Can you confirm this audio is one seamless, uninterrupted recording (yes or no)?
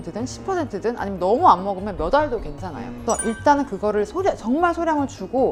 yes